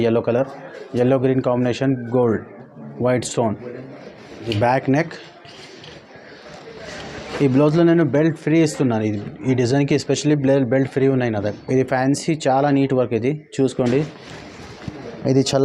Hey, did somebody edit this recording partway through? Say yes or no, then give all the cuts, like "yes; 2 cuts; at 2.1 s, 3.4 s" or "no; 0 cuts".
yes; 2 cuts; at 4.5 s, 11.5 s